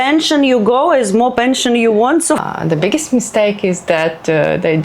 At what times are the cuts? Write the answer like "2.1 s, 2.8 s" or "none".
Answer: 2.4 s